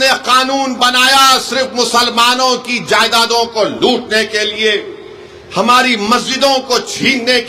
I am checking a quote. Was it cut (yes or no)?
no